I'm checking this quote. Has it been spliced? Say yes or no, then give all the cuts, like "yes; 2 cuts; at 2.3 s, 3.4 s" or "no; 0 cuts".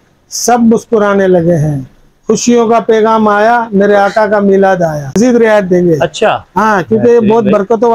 yes; 1 cut; at 5.2 s